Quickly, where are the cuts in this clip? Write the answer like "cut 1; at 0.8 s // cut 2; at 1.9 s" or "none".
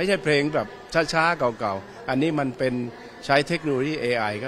none